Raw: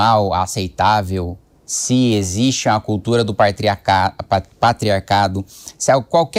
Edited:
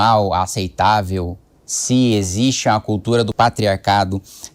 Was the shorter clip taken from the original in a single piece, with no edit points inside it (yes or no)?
no